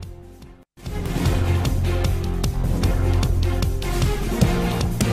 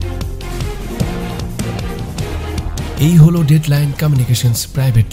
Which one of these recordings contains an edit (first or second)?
first